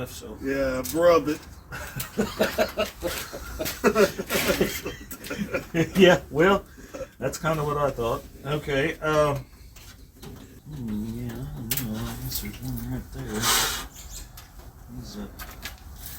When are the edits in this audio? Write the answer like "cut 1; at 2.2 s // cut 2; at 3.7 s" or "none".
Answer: none